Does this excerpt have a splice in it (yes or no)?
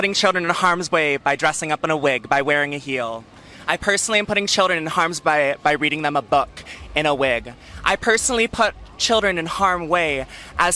no